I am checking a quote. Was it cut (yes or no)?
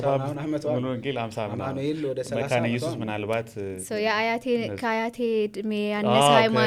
no